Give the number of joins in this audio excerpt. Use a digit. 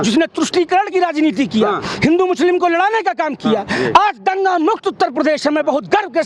0